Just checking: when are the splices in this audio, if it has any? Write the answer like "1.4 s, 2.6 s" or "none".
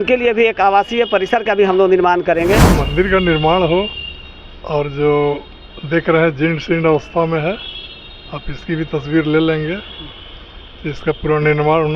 2.7 s